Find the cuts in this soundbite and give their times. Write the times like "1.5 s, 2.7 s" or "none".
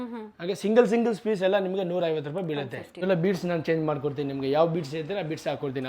3.0 s